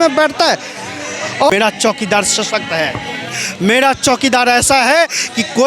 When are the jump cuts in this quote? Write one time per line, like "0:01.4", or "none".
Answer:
0:01.5